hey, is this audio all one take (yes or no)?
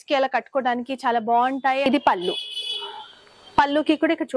no